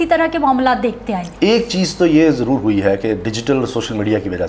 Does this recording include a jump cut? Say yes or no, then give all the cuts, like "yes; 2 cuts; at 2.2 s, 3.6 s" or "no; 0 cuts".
yes; 1 cut; at 1.3 s